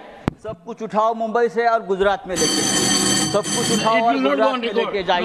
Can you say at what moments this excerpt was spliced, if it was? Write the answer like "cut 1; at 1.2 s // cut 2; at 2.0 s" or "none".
none